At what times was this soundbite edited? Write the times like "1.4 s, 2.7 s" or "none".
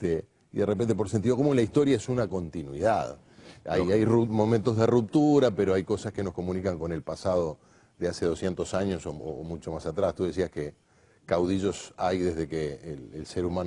10.4 s